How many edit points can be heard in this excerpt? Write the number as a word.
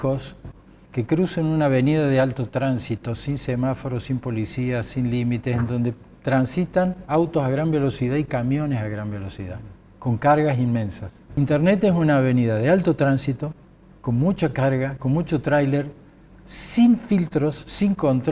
one